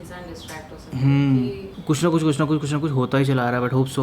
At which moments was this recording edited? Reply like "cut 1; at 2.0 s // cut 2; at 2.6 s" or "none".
cut 1; at 1.6 s